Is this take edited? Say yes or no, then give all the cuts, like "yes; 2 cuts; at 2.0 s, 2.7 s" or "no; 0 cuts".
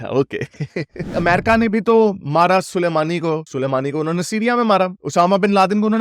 yes; 1 cut; at 1.1 s